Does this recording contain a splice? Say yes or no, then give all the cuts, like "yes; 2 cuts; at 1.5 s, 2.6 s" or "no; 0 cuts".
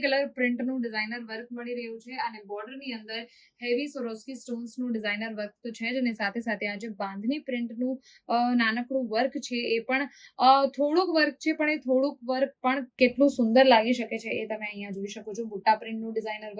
no; 0 cuts